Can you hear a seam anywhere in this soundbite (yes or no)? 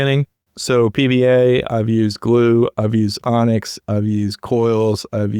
no